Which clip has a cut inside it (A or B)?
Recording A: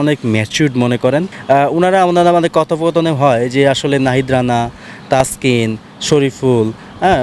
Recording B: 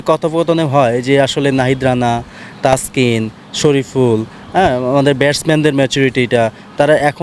A